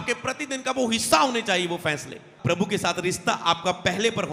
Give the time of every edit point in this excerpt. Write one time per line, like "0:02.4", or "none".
0:02.3